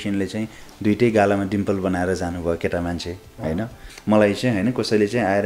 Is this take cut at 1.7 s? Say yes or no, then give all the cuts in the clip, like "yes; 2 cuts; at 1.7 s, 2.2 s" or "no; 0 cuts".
no; 1 cut; at 3.9 s